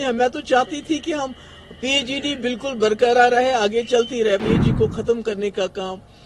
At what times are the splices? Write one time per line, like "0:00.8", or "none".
0:04.4